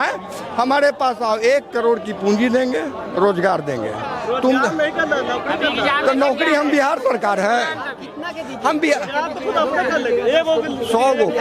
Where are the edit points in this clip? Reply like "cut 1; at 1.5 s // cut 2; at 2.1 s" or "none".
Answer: none